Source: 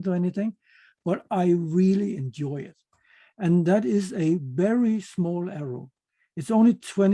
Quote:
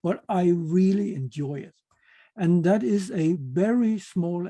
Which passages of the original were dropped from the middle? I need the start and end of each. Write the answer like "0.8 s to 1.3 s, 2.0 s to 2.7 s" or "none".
none